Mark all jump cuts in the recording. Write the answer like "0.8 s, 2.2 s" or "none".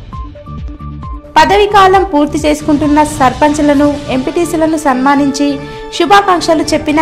none